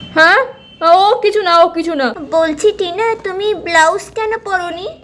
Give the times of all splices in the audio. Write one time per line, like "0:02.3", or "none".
0:02.2